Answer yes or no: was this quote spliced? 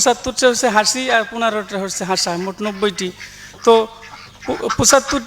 no